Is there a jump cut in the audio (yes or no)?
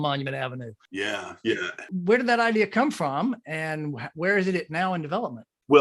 no